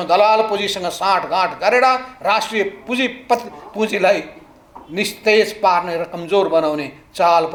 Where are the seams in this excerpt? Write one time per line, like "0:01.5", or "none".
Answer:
none

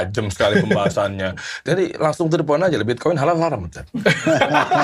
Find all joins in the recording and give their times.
0:01.6

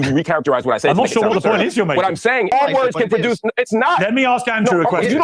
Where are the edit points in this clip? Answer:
0:02.5

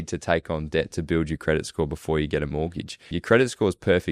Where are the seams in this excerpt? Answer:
0:03.1

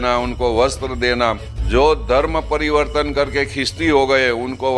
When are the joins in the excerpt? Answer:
0:01.5

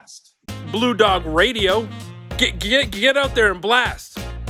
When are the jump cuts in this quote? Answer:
none

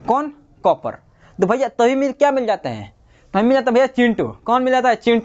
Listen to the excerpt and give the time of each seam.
none

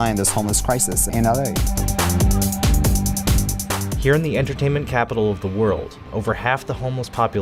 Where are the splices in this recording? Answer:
none

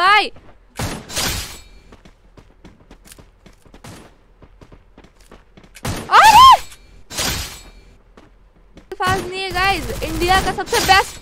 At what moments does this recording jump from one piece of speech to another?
0:08.9

